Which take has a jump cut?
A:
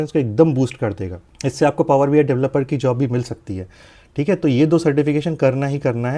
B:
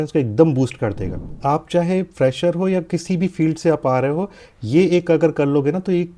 B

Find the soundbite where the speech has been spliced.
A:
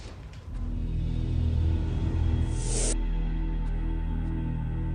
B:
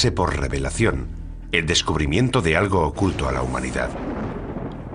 A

